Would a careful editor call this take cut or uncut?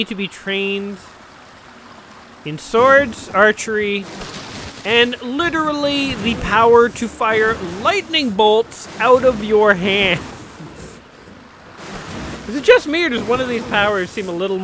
uncut